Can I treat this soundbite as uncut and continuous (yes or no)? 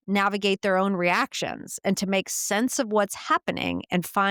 yes